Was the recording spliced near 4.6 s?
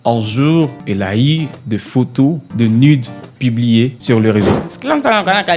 yes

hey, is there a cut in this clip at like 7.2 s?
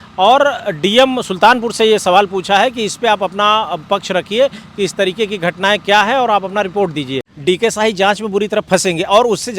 yes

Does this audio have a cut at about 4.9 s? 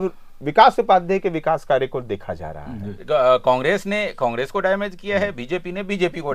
no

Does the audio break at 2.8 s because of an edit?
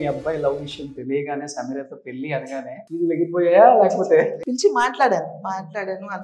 yes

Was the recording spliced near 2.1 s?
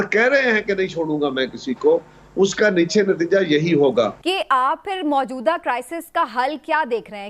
no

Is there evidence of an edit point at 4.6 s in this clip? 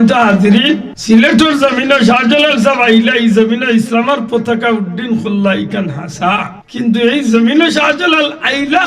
no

